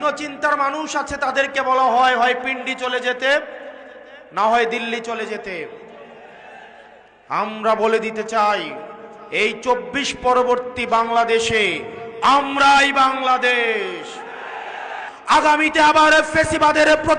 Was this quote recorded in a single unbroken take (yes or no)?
no